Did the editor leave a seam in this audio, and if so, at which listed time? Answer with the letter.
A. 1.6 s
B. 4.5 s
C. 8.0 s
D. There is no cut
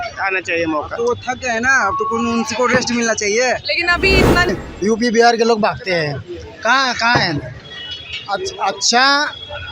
B